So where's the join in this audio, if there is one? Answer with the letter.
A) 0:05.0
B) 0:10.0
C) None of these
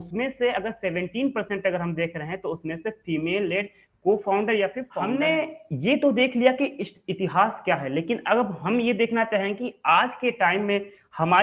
A